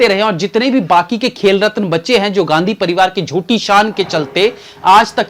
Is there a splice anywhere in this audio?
no; 0 cuts

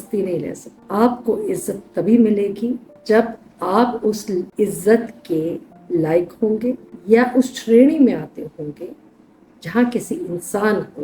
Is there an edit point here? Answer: yes; 1 cut; at 4.5 s

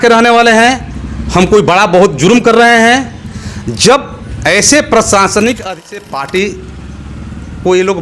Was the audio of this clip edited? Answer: yes; 1 cut; at 5.7 s

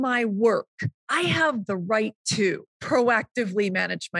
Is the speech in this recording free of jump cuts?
no; 1 cut; at 2.7 s

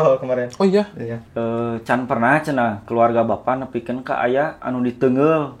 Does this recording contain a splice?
yes; 1 cut; at 1.2 s

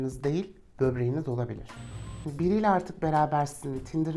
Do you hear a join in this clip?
yes; 1 cut; at 1.8 s

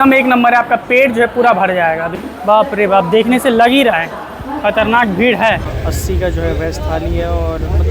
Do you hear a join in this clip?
yes; 2 cuts; at 2.1 s, 5.7 s

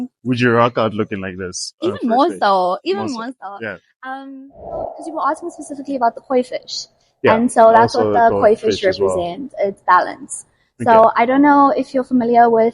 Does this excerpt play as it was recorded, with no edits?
no; 1 cut; at 5.0 s

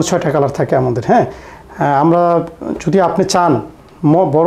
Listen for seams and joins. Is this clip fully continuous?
yes; 0 cuts

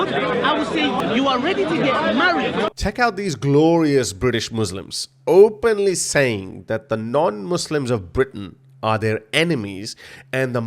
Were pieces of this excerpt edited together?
yes; 2 cuts; at 1.0 s, 2.8 s

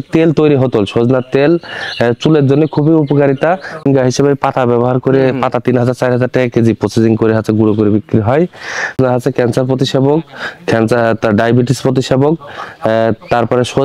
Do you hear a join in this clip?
yes; 1 cut; at 3.8 s

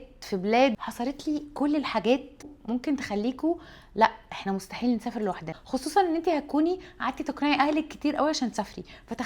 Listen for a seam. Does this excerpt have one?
yes; 3 cuts; at 0.9 s, 2.5 s, 5.5 s

